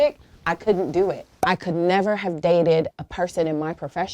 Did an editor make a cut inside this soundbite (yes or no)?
yes